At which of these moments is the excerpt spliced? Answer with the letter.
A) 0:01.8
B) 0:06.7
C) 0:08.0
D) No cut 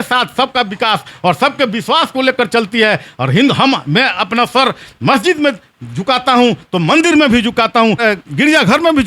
C